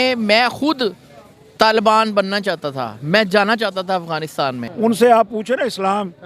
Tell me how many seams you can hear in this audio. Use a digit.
1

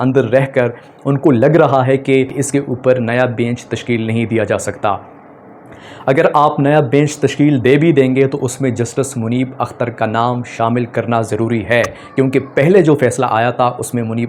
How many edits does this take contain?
1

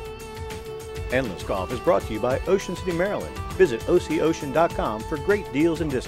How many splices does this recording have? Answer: 1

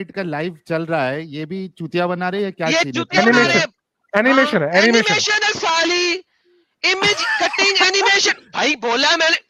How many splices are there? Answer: 0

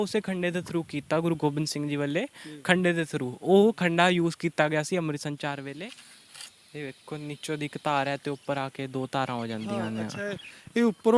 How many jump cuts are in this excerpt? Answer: 1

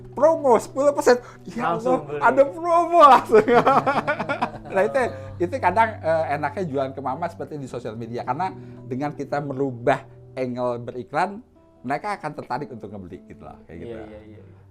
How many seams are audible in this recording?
0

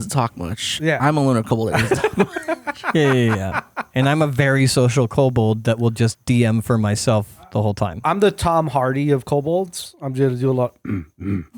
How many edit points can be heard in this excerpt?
0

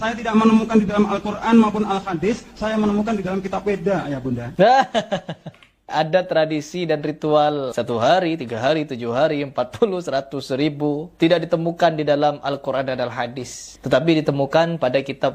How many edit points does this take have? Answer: 4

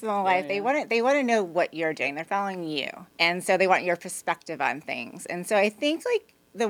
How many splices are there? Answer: 1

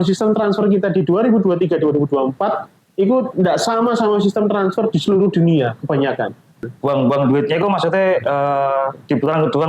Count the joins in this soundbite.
1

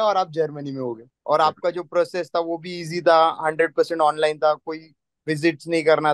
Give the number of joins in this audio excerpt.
1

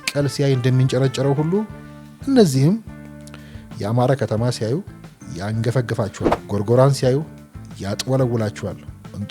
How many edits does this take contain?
1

